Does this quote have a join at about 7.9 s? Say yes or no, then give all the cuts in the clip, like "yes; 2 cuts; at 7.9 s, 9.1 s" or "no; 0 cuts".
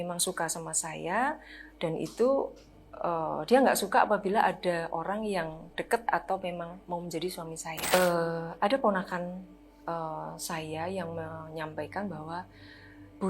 yes; 1 cut; at 7.9 s